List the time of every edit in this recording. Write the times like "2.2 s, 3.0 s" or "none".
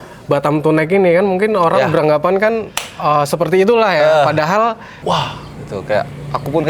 4.9 s